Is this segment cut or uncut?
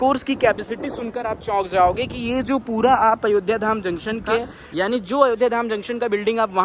cut